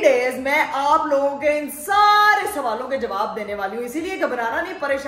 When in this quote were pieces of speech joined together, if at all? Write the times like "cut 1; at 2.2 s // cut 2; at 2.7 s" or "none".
none

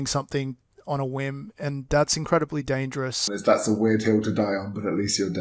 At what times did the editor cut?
cut 1; at 3.3 s

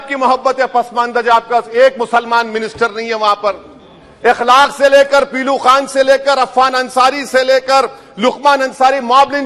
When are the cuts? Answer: none

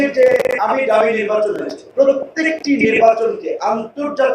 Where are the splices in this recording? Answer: cut 1; at 1.8 s

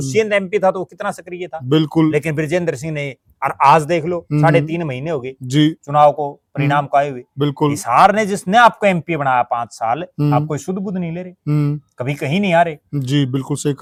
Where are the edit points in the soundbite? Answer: none

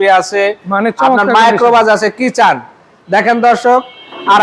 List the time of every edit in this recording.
none

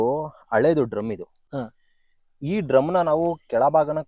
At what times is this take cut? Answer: none

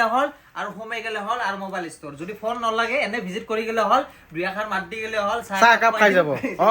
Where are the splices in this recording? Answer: none

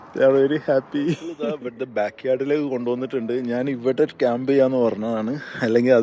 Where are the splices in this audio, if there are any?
cut 1; at 1.3 s

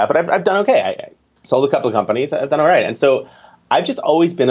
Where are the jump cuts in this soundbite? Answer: none

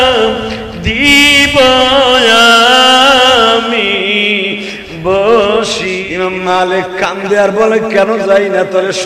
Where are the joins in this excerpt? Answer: cut 1; at 6.0 s

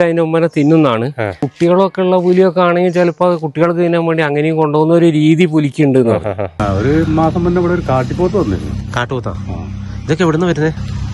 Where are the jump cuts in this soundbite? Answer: cut 1; at 1.4 s // cut 2; at 6.6 s

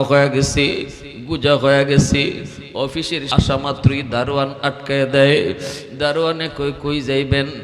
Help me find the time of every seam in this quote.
cut 1; at 3.3 s

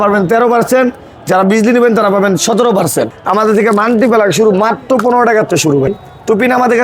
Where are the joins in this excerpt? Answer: cut 1; at 3.2 s // cut 2; at 5.9 s

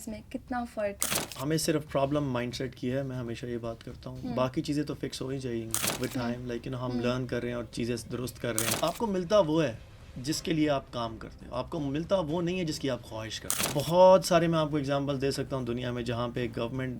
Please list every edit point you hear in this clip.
cut 1; at 1.2 s // cut 2; at 8.7 s // cut 3; at 13.7 s

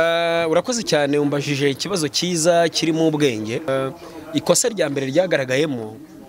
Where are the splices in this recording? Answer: cut 1; at 3.7 s

